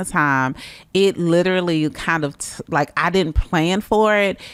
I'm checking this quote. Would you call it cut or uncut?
uncut